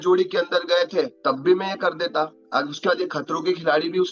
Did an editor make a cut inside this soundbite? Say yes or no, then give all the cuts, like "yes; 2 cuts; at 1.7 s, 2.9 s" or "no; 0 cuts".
yes; 2 cuts; at 1.1 s, 2.4 s